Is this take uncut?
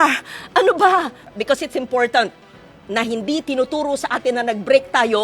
no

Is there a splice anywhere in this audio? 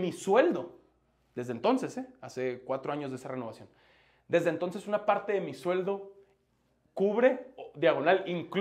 no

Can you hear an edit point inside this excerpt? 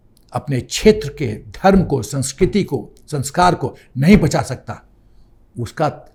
no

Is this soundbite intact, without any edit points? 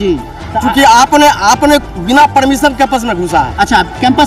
yes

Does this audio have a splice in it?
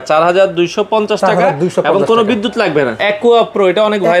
yes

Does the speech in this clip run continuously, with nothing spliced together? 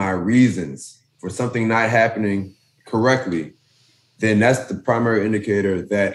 yes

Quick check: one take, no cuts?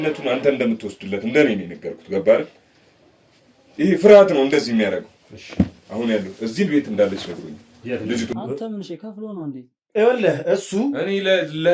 no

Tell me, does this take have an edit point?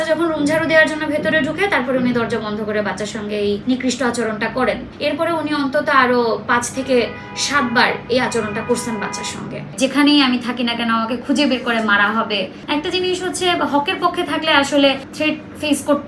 yes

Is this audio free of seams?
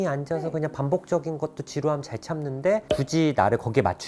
yes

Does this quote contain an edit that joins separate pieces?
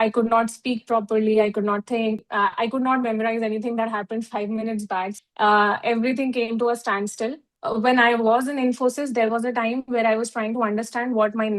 yes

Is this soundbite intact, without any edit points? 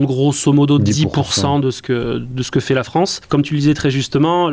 no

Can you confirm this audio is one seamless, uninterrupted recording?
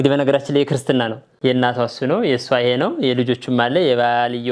no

